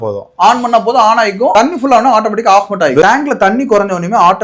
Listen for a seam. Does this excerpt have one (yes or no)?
yes